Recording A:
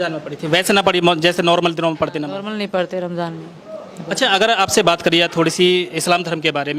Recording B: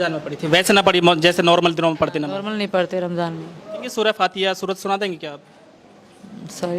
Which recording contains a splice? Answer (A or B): B